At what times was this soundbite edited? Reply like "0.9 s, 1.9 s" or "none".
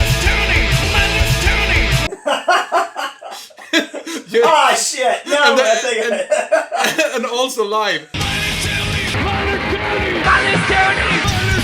2.0 s, 8.1 s